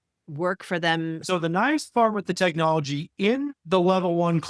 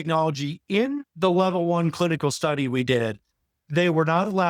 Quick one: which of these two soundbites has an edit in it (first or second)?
first